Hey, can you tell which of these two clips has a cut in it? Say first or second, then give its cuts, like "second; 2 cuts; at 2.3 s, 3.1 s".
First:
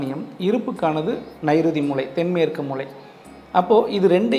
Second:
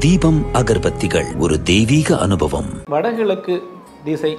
second; 1 cut; at 2.8 s